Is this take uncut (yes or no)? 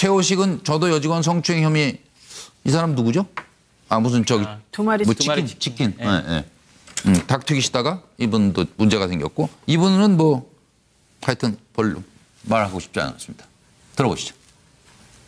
no